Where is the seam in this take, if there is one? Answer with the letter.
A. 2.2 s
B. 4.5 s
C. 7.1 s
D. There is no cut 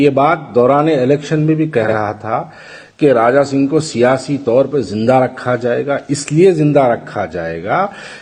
D